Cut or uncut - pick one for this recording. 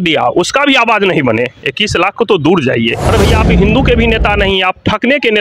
cut